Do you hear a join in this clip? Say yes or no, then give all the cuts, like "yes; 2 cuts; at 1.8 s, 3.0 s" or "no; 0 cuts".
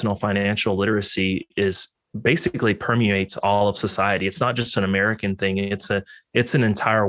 no; 0 cuts